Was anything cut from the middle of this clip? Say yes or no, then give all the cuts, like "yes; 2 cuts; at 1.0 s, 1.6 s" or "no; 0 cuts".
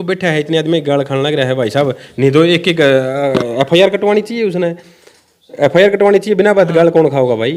no; 0 cuts